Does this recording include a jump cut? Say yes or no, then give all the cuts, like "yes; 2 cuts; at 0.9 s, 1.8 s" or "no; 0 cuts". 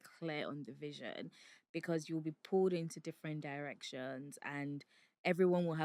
no; 0 cuts